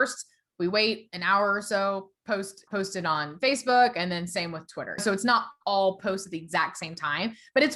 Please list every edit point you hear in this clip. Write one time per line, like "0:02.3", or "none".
0:02.6
0:05.0